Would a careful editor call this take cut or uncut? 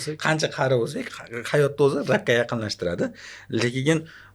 uncut